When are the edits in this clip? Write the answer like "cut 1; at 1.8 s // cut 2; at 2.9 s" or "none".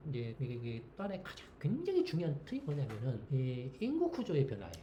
none